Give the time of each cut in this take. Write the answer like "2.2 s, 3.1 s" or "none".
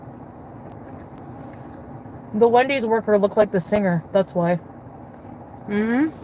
2.8 s